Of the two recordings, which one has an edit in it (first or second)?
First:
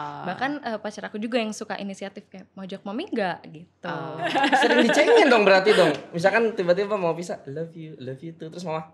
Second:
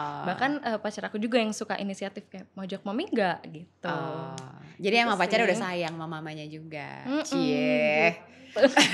first